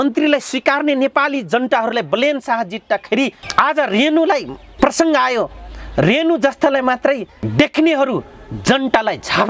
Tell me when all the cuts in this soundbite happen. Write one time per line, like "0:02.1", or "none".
0:03.4
0:04.6
0:07.4